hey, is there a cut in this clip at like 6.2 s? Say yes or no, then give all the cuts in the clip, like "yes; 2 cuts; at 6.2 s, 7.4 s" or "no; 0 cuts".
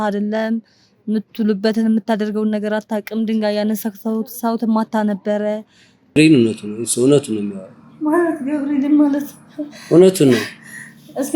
yes; 1 cut; at 6.2 s